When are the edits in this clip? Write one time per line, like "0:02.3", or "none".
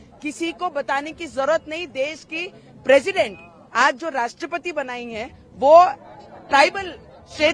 none